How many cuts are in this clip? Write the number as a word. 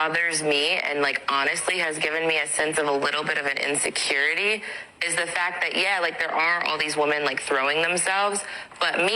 one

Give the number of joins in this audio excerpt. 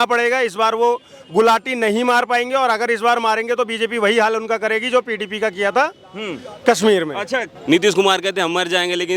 one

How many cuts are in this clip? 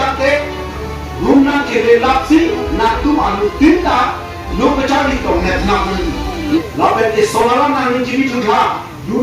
one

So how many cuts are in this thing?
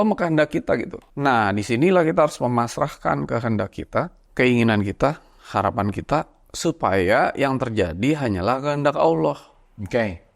two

